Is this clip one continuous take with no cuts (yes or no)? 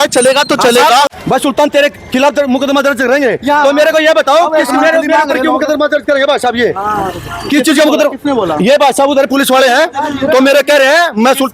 yes